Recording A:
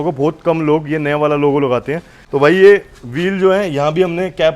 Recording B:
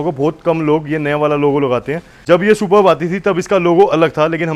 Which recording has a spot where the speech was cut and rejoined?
A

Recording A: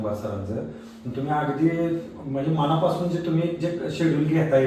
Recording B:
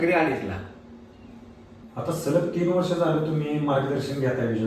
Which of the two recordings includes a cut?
B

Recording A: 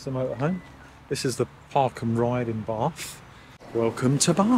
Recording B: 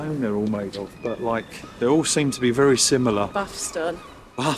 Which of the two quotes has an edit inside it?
A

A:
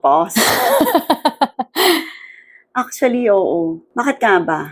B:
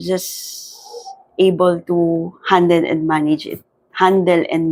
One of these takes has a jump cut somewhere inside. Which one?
A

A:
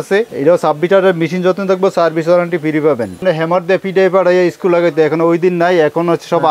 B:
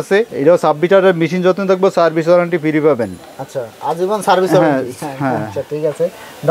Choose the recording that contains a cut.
A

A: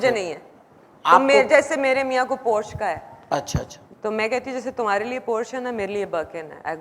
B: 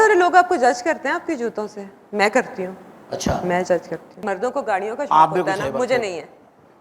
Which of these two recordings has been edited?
B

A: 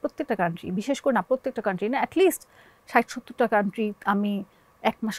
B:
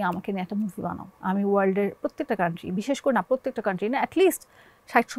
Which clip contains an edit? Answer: B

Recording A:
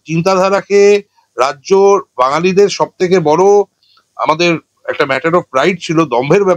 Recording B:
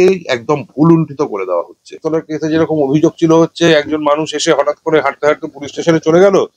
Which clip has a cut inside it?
B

